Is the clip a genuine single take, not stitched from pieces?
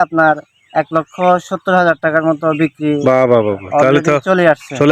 yes; 0 cuts

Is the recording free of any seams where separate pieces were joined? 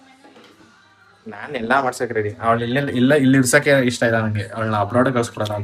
yes; 0 cuts

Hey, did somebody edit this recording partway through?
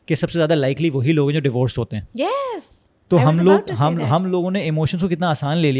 no; 0 cuts

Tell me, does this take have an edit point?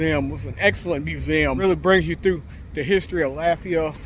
yes; 1 cut; at 1.6 s

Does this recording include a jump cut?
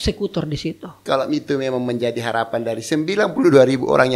yes; 1 cut; at 1.0 s

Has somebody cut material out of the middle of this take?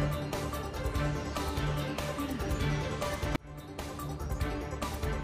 no; 0 cuts

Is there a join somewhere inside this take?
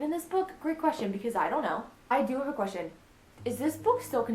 yes; 1 cut; at 2.1 s

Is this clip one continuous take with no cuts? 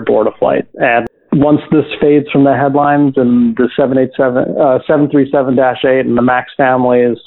no; 1 cut; at 1.0 s

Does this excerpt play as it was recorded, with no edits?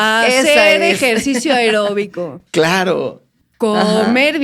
yes; 0 cuts

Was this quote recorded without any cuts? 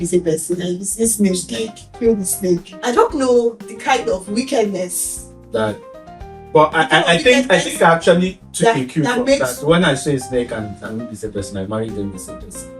no; 1 cut; at 2.7 s

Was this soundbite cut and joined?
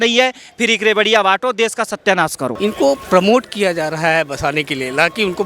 yes; 1 cut; at 2.5 s

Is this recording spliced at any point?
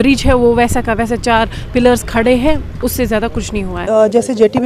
yes; 1 cut; at 3.8 s

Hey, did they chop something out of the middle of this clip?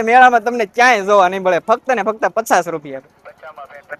no; 0 cuts

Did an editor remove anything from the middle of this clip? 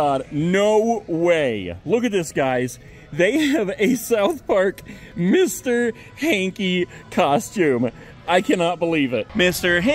no; 0 cuts

